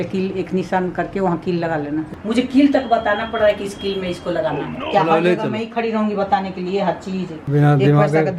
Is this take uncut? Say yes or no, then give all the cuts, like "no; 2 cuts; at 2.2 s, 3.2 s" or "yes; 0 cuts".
no; 3 cuts; at 2.1 s, 4.8 s, 7.5 s